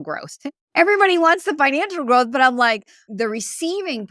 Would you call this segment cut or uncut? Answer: cut